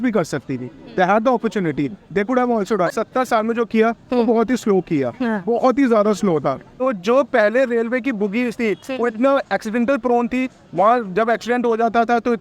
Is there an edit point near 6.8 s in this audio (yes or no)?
yes